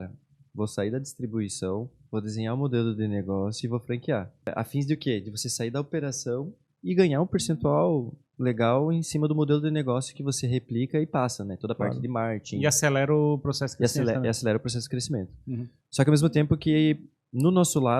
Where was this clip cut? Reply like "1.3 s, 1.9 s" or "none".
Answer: 4.5 s